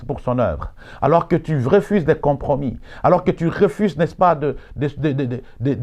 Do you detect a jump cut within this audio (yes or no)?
no